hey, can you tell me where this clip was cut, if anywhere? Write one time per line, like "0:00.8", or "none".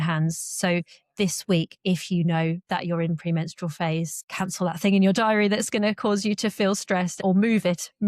0:04.2
0:07.2